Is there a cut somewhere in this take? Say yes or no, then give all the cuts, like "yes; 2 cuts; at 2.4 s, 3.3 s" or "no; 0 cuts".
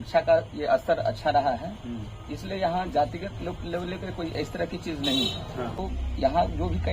yes; 1 cut; at 5.8 s